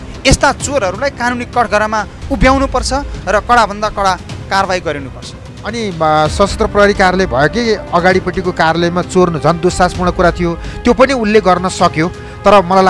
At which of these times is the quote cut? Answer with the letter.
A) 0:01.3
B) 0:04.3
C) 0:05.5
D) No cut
C